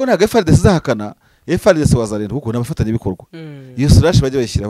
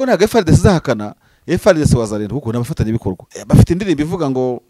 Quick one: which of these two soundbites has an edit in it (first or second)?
second